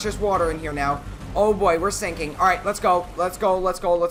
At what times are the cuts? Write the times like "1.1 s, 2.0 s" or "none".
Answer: none